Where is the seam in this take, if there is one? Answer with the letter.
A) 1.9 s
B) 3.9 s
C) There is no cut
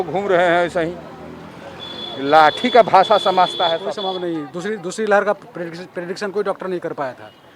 B